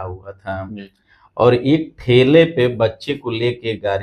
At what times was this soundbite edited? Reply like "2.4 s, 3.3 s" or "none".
none